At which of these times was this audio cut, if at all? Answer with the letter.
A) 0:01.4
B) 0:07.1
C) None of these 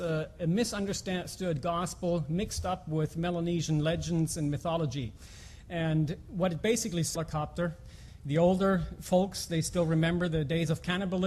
C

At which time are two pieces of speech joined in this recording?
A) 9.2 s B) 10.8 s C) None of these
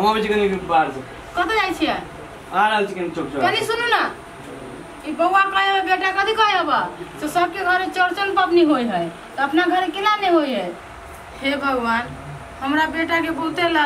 B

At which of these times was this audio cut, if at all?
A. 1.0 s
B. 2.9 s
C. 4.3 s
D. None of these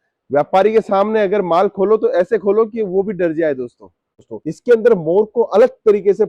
C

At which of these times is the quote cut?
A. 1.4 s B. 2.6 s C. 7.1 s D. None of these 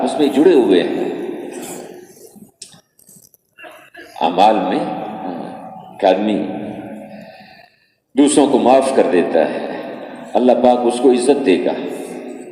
D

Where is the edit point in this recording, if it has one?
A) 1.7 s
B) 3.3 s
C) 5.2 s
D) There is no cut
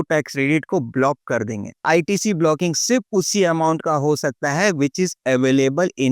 A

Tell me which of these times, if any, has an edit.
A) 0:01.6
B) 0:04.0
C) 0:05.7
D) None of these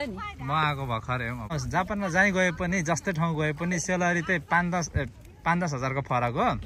A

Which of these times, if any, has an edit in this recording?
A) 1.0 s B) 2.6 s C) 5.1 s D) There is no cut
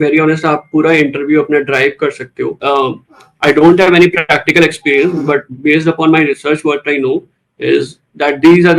B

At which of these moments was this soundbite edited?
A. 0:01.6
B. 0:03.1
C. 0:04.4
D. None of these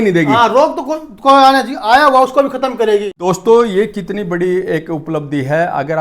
D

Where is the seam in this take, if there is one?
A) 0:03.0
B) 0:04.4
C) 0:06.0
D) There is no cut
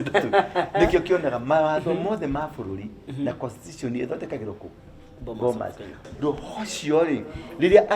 C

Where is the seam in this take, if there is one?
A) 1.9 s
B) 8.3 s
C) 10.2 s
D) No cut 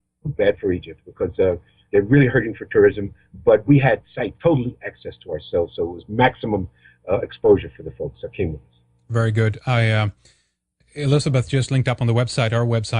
B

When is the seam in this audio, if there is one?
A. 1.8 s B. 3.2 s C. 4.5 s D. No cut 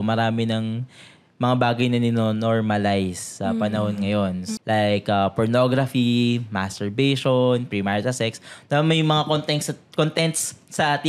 C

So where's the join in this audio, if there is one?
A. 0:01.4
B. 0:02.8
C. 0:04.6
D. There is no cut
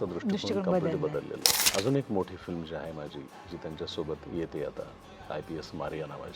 A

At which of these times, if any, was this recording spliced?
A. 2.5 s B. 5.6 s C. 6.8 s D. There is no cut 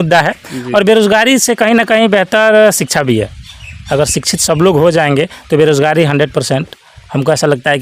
D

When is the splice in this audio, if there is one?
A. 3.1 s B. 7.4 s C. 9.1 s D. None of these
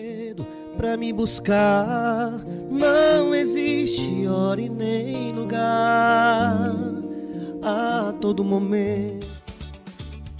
C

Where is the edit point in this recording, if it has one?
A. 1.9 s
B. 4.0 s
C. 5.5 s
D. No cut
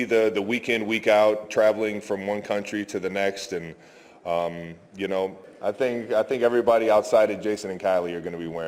C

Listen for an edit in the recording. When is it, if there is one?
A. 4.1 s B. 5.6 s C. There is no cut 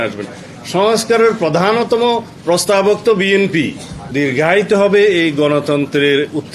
A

